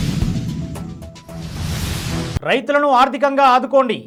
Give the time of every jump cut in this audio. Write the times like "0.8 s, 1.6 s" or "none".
none